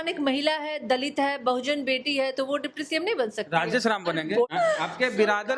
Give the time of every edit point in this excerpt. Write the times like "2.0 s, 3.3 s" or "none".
4.5 s